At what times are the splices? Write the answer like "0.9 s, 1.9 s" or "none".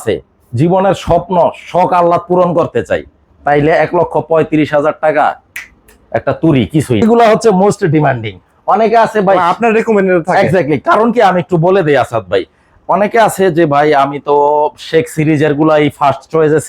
7.0 s